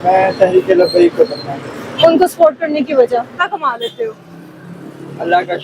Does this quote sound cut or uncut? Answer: cut